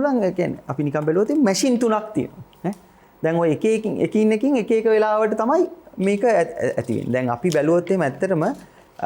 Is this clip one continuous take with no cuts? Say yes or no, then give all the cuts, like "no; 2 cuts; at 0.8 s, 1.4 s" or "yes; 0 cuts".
yes; 0 cuts